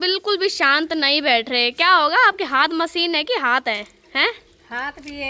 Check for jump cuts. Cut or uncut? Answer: uncut